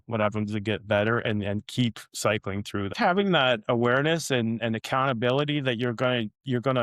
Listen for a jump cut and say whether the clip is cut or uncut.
cut